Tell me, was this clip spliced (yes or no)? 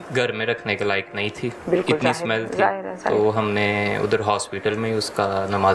no